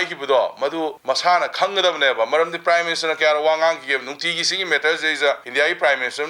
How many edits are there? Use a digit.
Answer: 2